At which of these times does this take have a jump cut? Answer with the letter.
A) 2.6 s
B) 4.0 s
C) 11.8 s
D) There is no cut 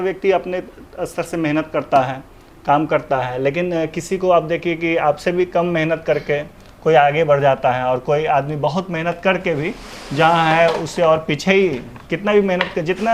D